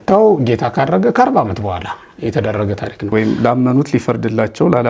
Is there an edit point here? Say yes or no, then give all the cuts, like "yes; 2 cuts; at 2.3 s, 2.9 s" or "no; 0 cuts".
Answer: yes; 1 cut; at 3.1 s